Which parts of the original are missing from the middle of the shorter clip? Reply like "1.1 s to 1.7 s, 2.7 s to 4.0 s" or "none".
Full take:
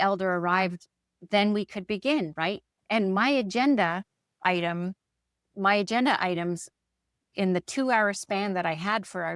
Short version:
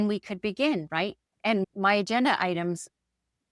3.1 s to 5.5 s

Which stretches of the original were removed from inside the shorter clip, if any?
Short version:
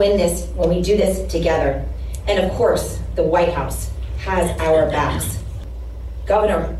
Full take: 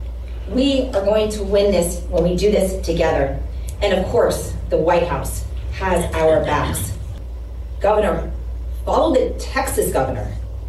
none

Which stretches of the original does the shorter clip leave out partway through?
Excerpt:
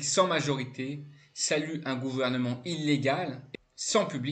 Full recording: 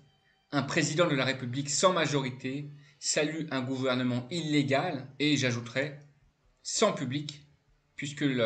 5.1 s to 6.3 s

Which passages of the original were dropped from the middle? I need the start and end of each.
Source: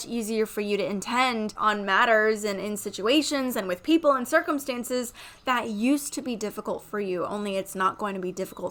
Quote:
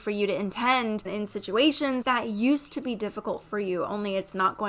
1.5 s to 2.5 s, 3.5 s to 5.4 s

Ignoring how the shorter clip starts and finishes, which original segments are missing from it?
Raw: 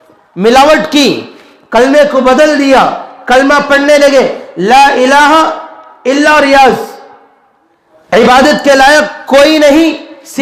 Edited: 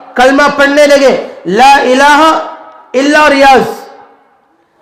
none

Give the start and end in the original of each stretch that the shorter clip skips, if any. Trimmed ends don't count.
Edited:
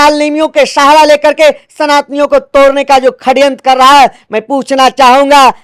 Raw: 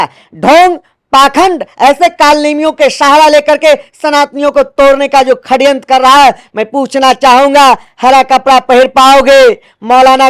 none

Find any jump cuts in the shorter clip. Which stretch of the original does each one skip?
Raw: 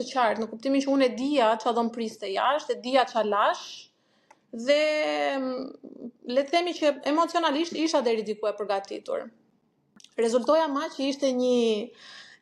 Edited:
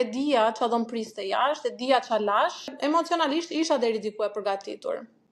3.8 s to 7.0 s

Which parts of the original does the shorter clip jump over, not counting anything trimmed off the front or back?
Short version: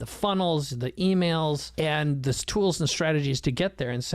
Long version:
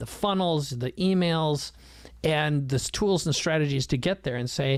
1.7 s to 2.1 s

